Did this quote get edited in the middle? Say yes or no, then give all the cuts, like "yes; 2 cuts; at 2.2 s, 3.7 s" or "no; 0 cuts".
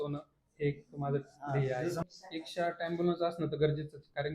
yes; 1 cut; at 2.0 s